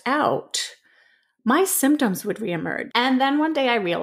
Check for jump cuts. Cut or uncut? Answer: cut